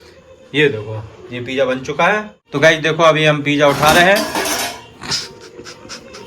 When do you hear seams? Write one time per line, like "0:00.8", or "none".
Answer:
0:02.4